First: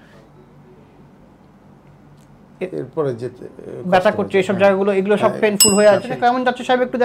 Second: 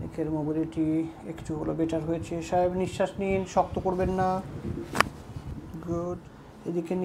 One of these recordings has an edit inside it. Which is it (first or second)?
first